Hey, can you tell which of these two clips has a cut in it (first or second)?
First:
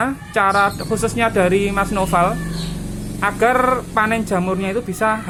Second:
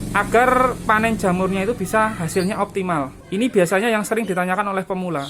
second